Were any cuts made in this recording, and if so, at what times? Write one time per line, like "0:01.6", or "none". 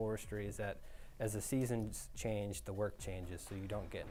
none